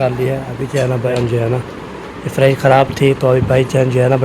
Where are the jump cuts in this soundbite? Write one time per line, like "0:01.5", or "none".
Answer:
0:01.1